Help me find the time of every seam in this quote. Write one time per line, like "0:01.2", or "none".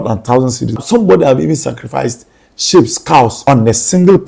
0:00.8
0:03.4